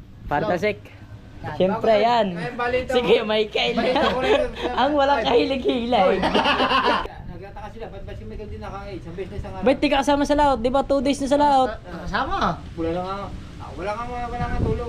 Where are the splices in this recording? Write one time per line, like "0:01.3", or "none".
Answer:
0:07.0